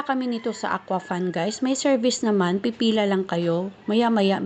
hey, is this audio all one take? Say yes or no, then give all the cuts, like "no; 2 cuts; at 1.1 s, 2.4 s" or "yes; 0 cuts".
yes; 0 cuts